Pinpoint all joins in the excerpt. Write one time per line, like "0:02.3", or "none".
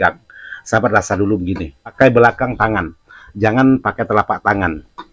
0:01.9